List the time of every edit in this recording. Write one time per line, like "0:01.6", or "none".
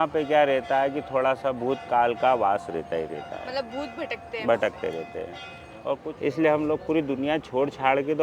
0:06.0

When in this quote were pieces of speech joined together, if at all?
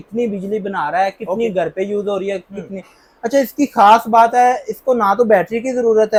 none

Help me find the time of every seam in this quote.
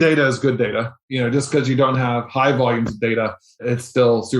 0:01.1
0:03.6

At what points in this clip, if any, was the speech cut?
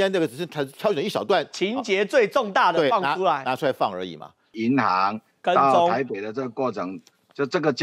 0:04.5

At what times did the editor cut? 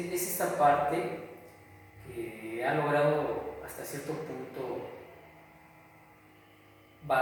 none

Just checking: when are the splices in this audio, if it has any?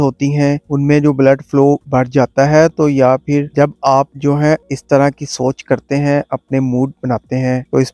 none

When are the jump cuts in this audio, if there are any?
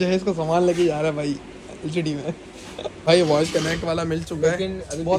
0:03.0

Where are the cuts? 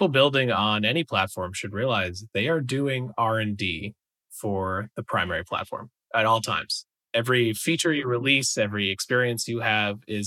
none

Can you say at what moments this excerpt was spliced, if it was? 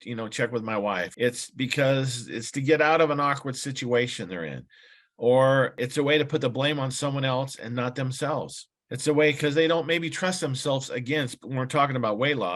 0:01.1
0:05.7

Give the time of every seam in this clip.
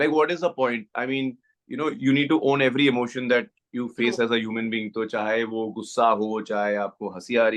none

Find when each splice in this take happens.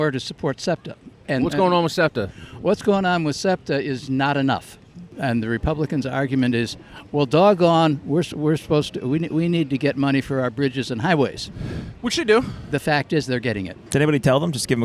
0:01.2
0:05.1
0:13.8

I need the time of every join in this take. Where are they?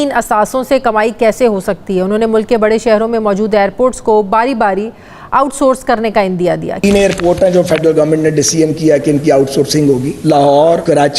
0:06.8

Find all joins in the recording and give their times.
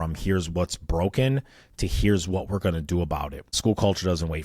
0:03.4

